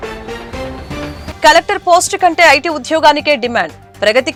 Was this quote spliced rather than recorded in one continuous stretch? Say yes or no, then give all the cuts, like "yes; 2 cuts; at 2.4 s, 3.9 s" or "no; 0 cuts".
no; 0 cuts